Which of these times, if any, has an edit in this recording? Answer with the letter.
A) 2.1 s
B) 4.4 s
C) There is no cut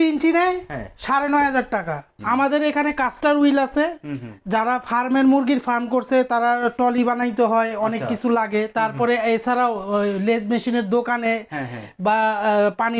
A